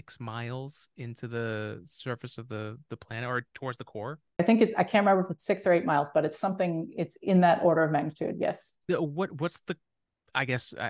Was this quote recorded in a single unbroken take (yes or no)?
no